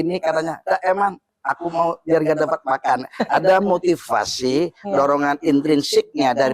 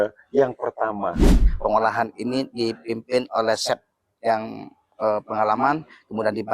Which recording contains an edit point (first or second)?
second